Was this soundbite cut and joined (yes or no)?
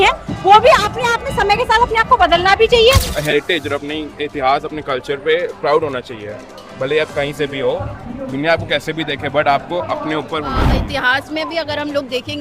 yes